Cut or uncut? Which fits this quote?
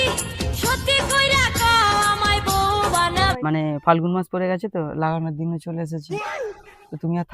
cut